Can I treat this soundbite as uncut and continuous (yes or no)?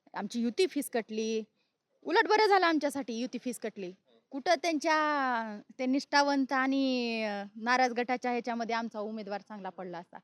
yes